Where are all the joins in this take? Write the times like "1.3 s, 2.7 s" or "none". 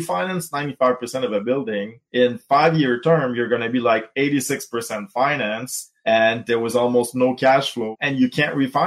2.0 s, 7.9 s